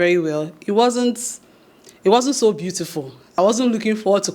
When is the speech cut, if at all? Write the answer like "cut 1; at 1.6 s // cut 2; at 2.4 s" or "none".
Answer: cut 1; at 3.3 s